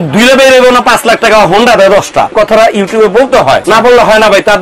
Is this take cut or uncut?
cut